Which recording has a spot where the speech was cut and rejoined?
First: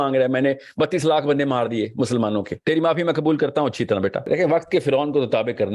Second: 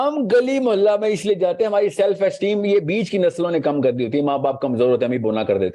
first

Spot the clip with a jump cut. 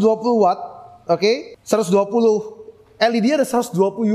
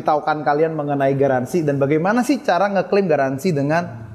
first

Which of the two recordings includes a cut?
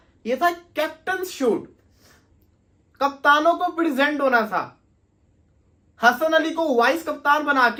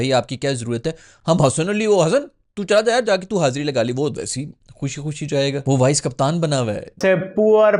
second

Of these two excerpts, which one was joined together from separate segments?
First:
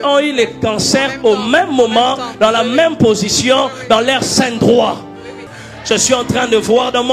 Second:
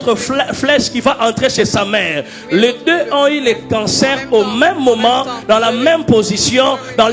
first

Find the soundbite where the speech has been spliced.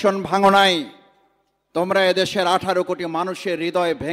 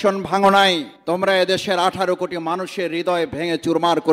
second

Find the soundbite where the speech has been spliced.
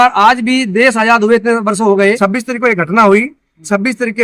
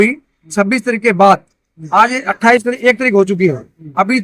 first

